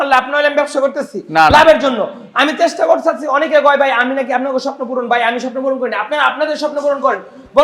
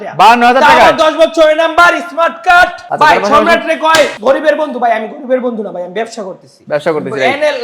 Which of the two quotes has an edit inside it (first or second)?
second